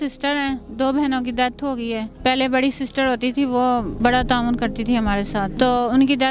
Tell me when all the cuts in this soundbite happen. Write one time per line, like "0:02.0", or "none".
0:02.1
0:03.9
0:05.5